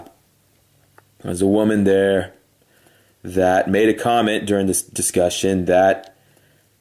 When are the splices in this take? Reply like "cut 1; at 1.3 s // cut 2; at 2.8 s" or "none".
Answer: none